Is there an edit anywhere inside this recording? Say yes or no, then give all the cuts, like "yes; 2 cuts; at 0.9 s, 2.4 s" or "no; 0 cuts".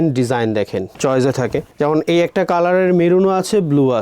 yes; 1 cut; at 0.9 s